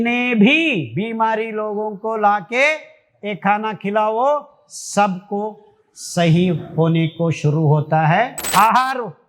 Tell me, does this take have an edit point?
yes; 1 cut; at 8.4 s

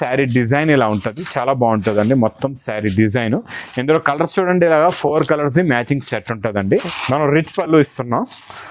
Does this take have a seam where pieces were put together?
yes; 1 cut; at 6.9 s

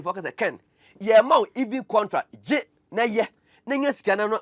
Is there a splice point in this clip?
no; 0 cuts

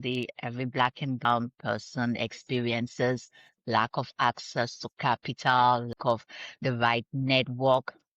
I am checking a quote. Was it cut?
yes; 2 cuts; at 1.2 s, 5.9 s

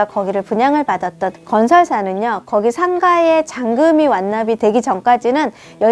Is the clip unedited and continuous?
no; 2 cuts; at 1.4 s, 4.6 s

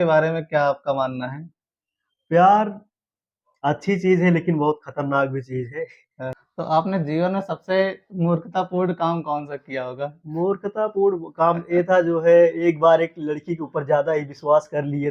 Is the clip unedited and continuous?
no; 1 cut; at 6.4 s

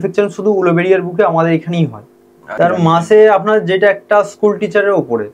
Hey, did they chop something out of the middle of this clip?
yes; 1 cut; at 2.5 s

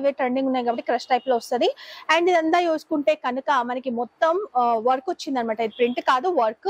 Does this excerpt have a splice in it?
no; 0 cuts

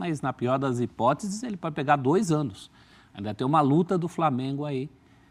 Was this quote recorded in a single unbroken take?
yes; 0 cuts

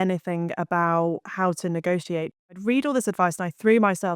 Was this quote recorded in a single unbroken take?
no; 1 cut; at 2.5 s

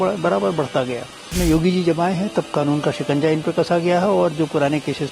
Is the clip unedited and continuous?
no; 1 cut; at 1.4 s

